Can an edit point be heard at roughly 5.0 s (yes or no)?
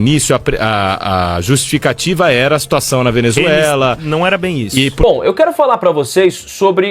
yes